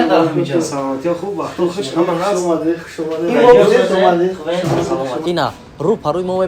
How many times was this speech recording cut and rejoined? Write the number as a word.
one